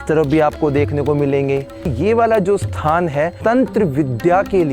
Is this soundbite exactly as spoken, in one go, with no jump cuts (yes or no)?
no